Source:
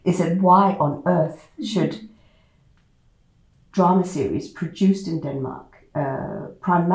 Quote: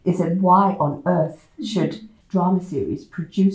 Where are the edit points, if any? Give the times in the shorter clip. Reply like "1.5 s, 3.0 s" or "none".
2.1 s